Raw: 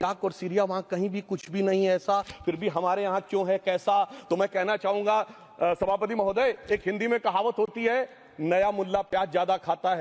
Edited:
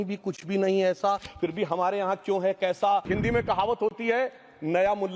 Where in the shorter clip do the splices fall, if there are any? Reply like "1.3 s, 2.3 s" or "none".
3.1 s